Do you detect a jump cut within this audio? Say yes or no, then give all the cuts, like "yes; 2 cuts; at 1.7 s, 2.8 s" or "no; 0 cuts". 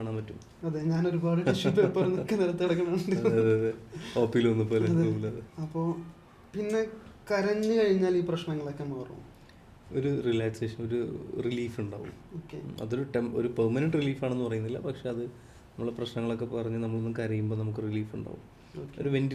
no; 0 cuts